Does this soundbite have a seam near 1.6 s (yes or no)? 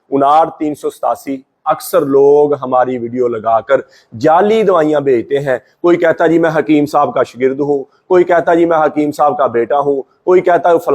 yes